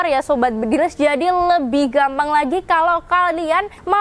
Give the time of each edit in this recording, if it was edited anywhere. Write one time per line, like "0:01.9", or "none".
none